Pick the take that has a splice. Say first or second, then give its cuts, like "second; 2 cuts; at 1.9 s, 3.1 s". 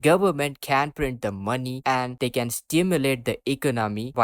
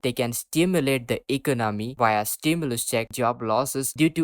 second; 1 cut; at 3.1 s